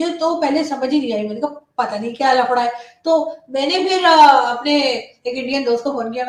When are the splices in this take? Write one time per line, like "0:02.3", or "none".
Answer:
none